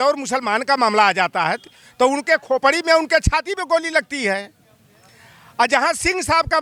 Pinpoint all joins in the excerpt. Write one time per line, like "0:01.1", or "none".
none